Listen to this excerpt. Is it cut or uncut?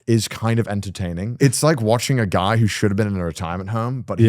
cut